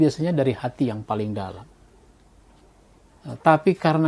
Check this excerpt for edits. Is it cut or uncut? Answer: cut